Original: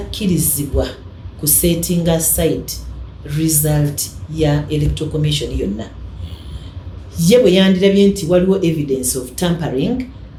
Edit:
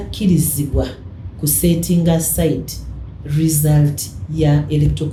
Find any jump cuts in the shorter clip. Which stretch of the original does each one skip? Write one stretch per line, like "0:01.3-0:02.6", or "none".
none